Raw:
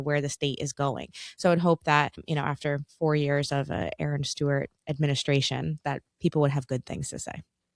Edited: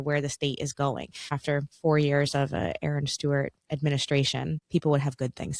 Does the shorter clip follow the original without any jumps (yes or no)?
no